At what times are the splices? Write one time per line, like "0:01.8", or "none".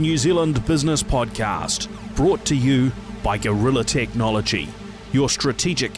none

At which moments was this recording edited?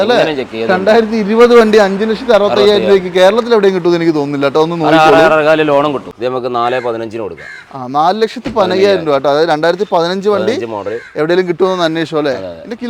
0:06.1

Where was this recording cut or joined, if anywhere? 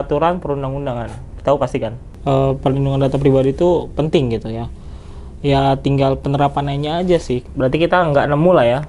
0:02.1
0:07.4

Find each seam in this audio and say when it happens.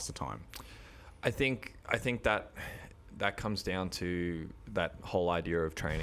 none

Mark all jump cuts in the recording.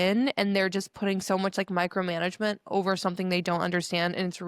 none

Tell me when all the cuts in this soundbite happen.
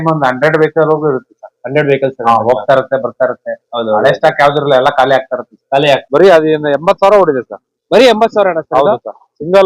0:06.0

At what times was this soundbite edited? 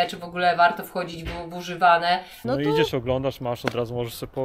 0:02.4

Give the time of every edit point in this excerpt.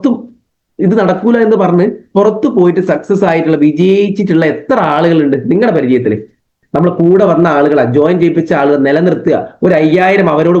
0:06.6

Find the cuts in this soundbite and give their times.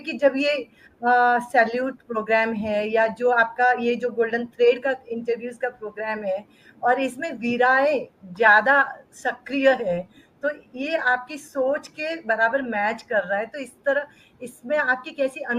none

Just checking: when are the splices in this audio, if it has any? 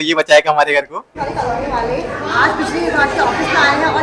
0:01.0

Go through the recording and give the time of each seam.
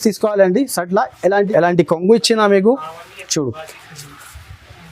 0:01.5

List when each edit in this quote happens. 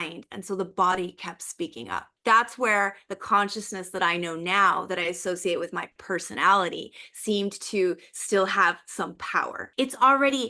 0:02.1
0:09.6

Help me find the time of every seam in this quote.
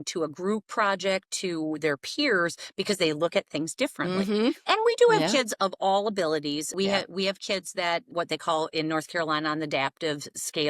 0:04.6
0:06.7
0:08.1

